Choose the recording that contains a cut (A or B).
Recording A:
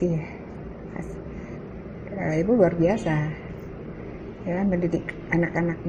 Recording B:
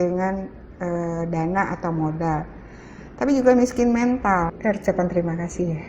B